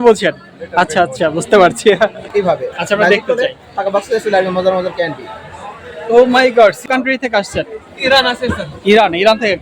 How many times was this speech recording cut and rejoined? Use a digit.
2